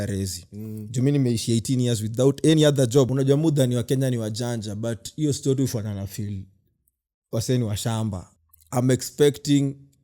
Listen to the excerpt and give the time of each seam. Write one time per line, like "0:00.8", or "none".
0:03.1
0:08.3